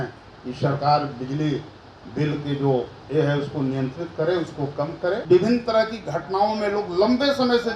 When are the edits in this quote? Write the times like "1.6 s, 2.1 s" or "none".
5.2 s